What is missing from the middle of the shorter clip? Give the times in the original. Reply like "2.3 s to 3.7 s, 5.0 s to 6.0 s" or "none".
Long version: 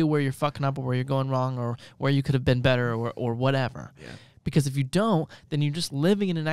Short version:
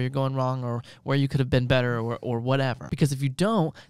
3.8 s to 4.4 s

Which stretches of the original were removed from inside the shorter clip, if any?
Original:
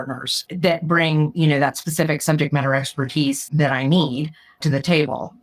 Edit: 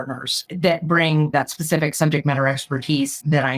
1.3 s to 1.6 s

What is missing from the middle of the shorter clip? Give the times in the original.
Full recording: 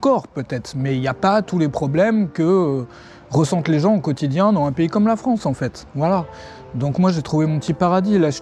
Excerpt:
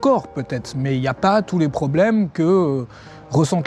none

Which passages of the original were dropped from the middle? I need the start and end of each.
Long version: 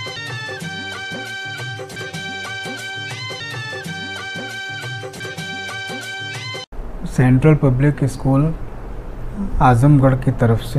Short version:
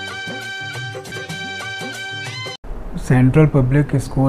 3.3 s to 6.5 s

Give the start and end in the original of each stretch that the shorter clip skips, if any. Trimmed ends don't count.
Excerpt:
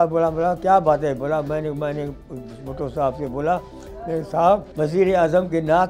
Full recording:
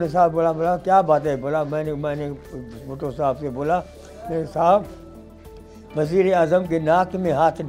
4.9 s to 5.9 s

